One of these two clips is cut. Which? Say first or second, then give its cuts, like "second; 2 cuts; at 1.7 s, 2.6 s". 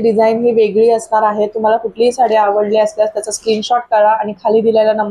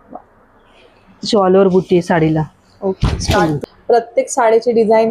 second; 1 cut; at 3.6 s